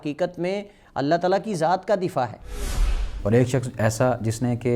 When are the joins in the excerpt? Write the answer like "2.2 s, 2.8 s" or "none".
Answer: 2.9 s